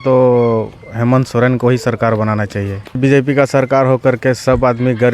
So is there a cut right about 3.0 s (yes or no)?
yes